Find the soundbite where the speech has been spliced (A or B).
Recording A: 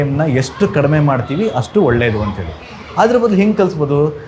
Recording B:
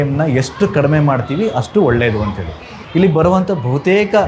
B